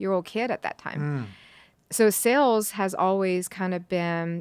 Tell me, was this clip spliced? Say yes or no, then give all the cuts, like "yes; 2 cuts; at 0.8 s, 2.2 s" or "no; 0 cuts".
yes; 1 cut; at 1.7 s